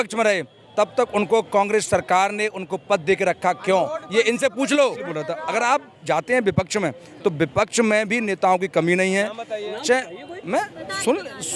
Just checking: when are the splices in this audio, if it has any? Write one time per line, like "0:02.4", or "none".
0:05.3